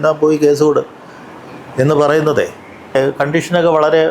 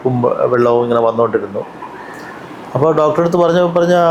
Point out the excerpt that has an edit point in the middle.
first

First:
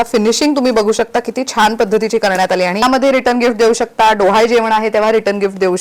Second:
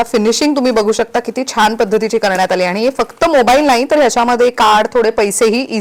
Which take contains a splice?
first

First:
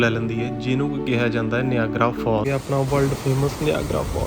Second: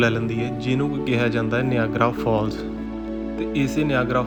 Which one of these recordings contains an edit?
first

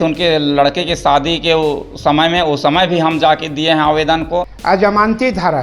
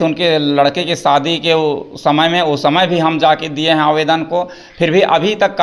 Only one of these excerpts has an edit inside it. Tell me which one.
first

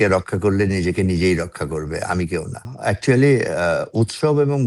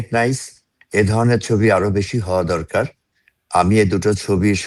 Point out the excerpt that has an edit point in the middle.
first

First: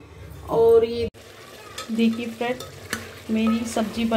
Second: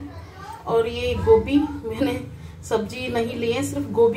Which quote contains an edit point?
first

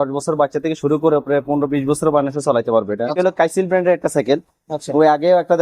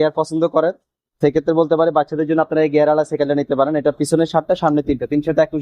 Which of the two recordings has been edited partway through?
first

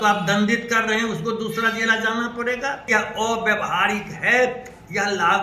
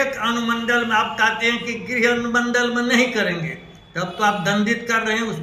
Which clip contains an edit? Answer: first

